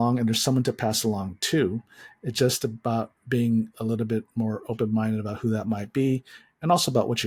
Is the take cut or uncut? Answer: uncut